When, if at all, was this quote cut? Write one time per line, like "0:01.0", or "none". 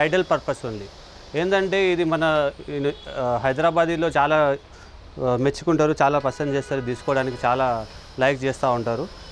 none